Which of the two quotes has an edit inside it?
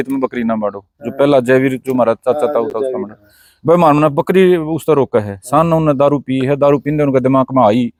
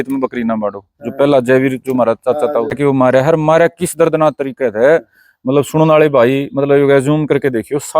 second; 1 cut; at 2.8 s

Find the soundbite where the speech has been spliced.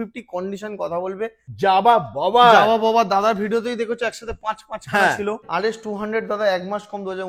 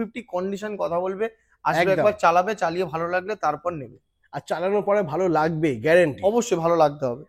first; 2 cuts; at 1.4 s, 5.4 s

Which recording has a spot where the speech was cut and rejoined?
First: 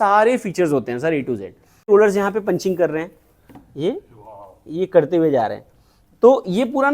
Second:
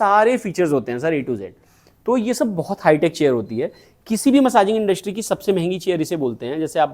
first; 1 cut; at 1.9 s

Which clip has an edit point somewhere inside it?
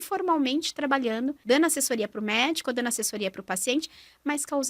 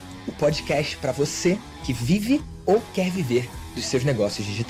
first; 1 cut; at 1.4 s

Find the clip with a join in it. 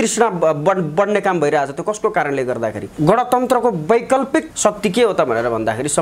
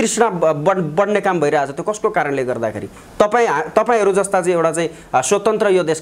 first; 2 cuts; at 2.8 s, 4.5 s

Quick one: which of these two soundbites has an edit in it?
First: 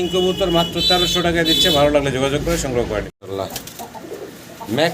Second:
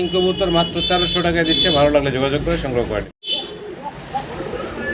first; 1 cut; at 3.2 s

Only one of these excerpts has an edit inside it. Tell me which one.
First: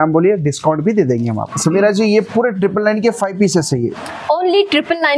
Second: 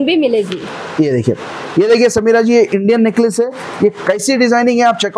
first; 1 cut; at 1.5 s

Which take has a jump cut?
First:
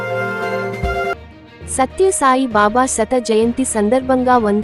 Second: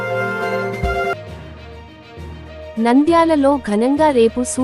second; 1 cut; at 1.1 s

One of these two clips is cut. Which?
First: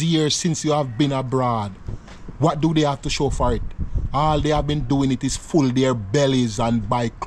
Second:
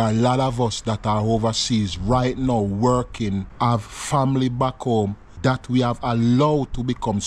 second; 2 cuts; at 3.5 s, 5.3 s

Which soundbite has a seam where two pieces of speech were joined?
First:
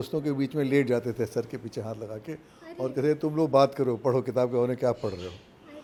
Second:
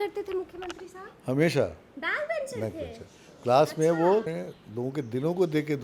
second; 1 cut; at 4.3 s

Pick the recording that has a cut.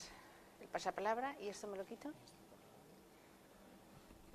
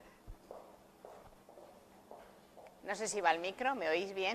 second; 1 cut; at 3.0 s

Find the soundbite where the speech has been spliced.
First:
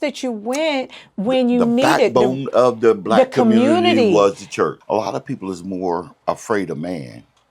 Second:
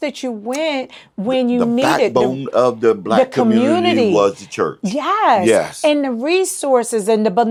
first; 2 cuts; at 4.8 s, 6.1 s

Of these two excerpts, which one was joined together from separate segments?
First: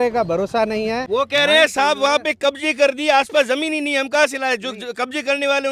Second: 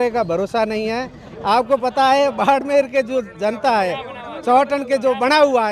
first; 1 cut; at 1.0 s

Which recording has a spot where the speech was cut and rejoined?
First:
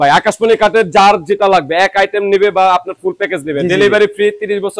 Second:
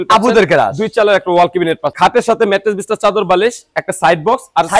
second; 1 cut; at 1.9 s

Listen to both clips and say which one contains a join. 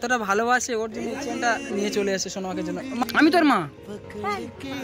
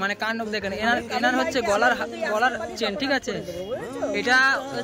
first; 1 cut; at 3.0 s

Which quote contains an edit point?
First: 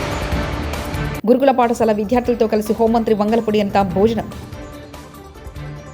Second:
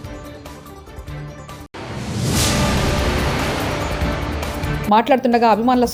first; 1 cut; at 1.0 s

